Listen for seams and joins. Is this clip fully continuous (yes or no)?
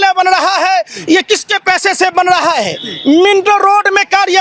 yes